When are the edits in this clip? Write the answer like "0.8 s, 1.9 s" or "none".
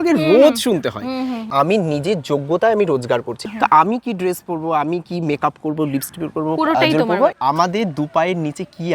1.5 s, 3.3 s, 7.3 s